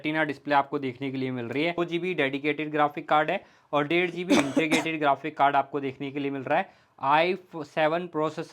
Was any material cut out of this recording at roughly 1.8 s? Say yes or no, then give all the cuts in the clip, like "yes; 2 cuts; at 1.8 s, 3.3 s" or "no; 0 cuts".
yes; 1 cut; at 1.8 s